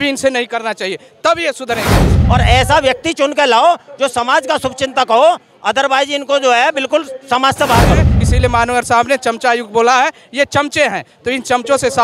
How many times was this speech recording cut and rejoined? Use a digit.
2